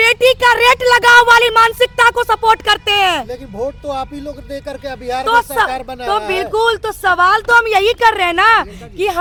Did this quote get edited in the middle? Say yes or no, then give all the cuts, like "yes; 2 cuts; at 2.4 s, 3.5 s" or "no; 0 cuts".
no; 0 cuts